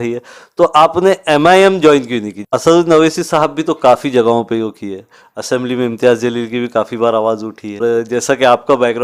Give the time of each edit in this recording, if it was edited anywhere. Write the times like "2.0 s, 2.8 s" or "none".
2.5 s, 7.8 s